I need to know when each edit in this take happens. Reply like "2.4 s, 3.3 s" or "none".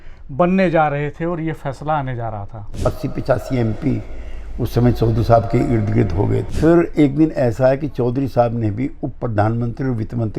2.7 s, 6.5 s